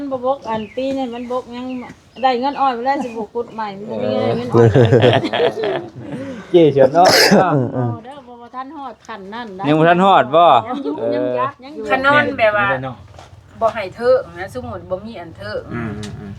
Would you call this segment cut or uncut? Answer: cut